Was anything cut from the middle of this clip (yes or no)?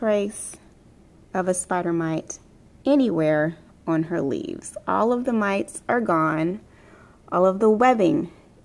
no